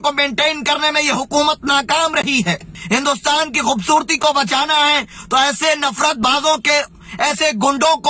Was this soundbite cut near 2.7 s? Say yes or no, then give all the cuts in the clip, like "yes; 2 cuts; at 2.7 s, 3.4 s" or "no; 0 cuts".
yes; 1 cut; at 2.7 s